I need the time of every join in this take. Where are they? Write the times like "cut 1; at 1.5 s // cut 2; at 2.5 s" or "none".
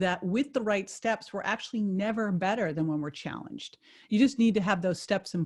none